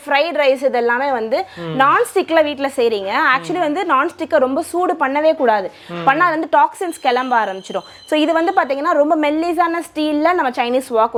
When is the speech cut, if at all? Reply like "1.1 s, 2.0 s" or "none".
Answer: none